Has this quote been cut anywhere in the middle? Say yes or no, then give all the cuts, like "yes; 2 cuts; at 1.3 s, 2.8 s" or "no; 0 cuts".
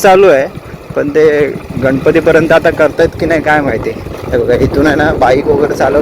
no; 0 cuts